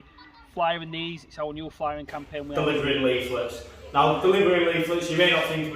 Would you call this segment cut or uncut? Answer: cut